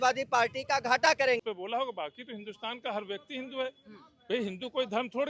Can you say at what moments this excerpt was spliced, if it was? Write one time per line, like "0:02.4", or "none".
0:01.4